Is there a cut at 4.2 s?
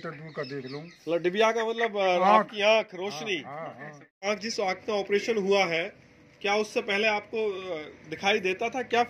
yes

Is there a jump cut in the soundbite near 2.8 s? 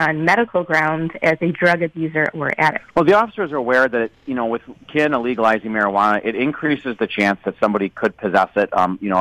yes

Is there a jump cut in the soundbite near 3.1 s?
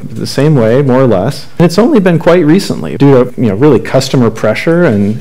yes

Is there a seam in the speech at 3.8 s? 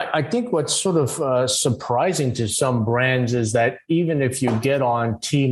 no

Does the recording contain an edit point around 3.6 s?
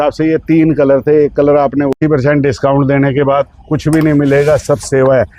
no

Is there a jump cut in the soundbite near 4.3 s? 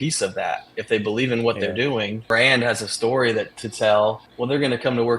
yes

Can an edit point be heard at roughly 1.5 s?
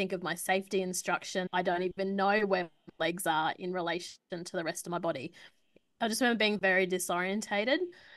yes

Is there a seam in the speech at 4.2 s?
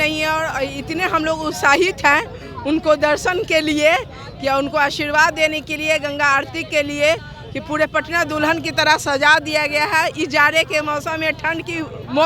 no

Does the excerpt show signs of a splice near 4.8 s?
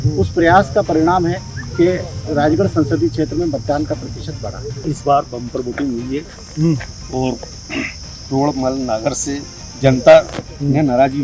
yes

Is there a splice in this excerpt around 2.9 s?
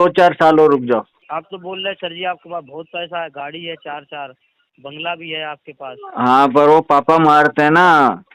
no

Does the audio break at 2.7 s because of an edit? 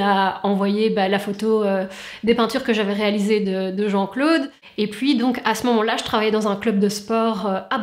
no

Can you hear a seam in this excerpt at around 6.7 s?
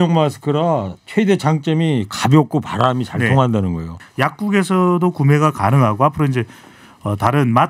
no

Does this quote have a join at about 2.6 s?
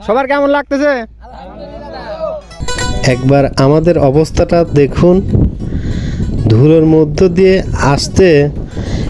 yes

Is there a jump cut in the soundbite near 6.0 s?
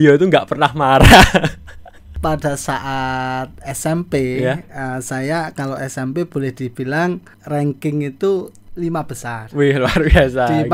no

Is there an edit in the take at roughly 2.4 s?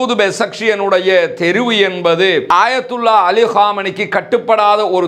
yes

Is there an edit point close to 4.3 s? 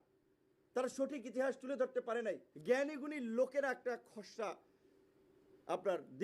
no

